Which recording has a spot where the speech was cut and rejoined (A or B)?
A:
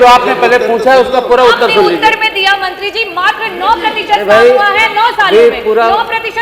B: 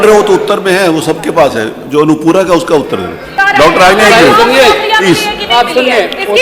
B